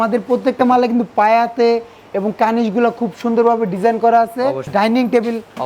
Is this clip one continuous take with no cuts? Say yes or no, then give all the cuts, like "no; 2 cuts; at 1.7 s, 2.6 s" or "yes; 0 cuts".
no; 1 cut; at 4.6 s